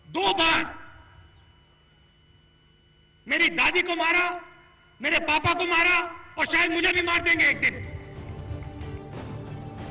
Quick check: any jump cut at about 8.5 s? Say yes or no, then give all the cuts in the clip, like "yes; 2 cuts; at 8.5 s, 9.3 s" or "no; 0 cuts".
yes; 1 cut; at 8.5 s